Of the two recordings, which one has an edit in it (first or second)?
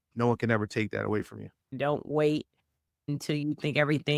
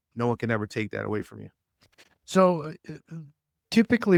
first